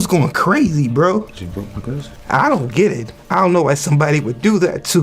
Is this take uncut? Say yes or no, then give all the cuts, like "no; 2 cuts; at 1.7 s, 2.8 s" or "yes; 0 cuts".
no; 1 cut; at 1.3 s